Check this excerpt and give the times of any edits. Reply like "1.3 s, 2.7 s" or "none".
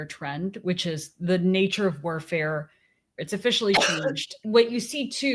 3.2 s, 4.4 s